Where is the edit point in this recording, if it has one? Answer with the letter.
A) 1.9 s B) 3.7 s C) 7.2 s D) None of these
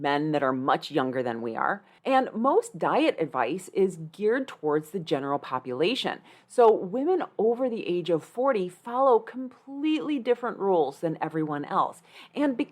A